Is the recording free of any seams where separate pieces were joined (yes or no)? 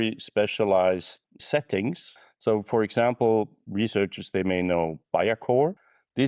no